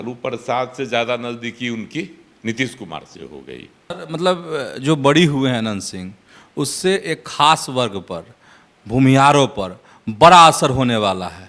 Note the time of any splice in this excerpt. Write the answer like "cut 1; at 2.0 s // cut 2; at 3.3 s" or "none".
cut 1; at 3.9 s